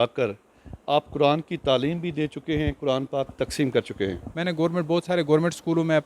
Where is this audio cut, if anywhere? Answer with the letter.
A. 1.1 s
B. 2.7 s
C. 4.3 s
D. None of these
C